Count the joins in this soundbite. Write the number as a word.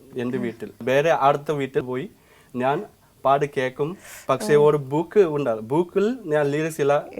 two